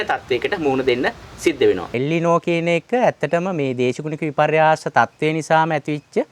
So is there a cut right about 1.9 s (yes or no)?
yes